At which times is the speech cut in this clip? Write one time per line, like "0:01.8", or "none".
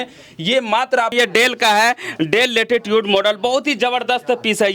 0:01.1